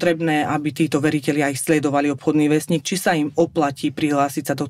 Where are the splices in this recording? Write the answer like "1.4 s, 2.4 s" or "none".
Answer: none